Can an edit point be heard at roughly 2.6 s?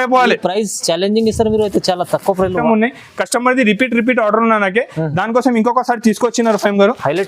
yes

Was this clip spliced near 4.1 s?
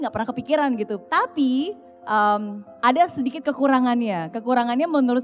no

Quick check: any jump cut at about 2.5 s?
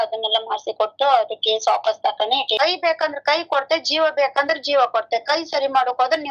yes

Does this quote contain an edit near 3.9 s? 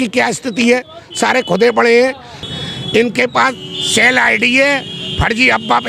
no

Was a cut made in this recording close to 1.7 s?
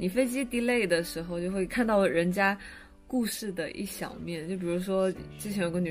yes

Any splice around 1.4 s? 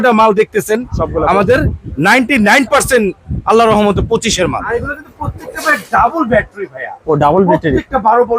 no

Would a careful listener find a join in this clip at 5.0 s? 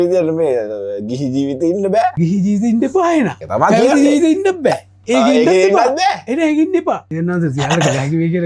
no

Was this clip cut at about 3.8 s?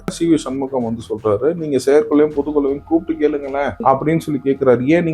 yes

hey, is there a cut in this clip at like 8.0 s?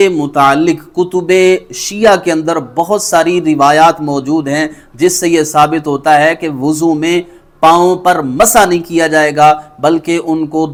no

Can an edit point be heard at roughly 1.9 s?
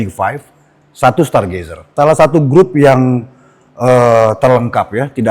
yes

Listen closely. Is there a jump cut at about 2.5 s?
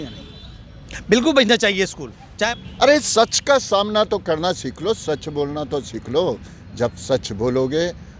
yes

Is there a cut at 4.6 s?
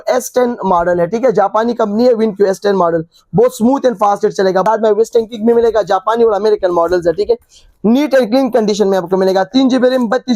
yes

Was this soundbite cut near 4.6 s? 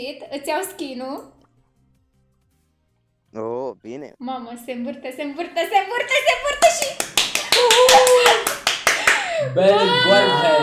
no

